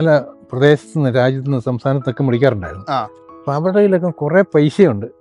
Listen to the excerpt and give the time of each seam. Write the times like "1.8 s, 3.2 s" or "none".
none